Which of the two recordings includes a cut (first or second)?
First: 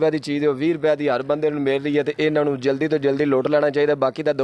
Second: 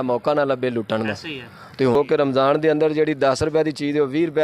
second